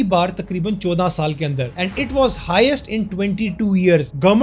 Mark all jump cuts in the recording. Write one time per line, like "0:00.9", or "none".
none